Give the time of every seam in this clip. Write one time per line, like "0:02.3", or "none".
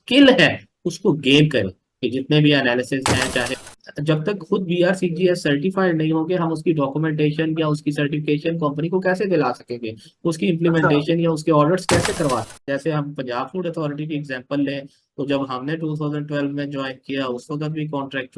0:03.7
0:12.6